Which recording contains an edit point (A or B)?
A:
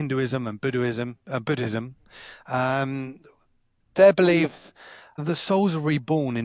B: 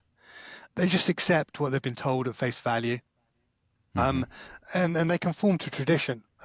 A